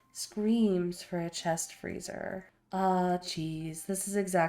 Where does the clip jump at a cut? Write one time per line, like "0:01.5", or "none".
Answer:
0:02.5